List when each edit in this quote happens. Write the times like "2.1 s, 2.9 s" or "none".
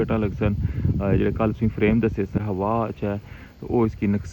2.4 s